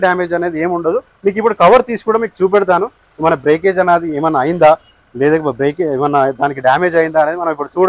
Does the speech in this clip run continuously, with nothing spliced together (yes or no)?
yes